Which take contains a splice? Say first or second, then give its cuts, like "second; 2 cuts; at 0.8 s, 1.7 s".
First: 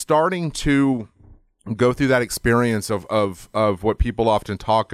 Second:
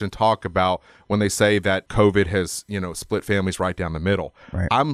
second; 1 cut; at 1.9 s